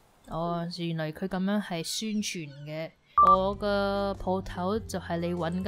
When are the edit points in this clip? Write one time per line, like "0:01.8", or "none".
0:03.1